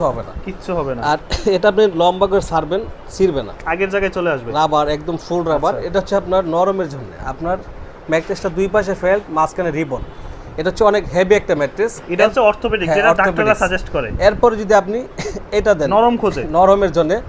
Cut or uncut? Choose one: uncut